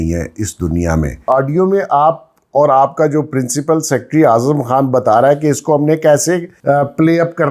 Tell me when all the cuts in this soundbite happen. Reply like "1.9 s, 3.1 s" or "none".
1.2 s, 6.5 s